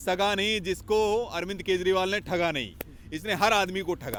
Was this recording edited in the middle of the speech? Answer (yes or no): no